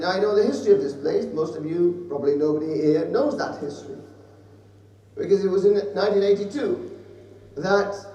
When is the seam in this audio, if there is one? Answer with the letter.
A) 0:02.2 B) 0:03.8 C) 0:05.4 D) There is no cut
D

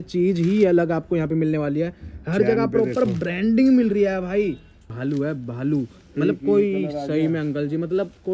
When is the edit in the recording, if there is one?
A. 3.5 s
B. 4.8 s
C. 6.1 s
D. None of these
B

